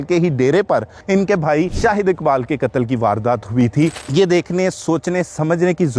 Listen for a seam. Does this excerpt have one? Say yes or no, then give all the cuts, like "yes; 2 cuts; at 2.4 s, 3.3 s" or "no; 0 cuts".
yes; 3 cuts; at 0.9 s, 1.7 s, 4.0 s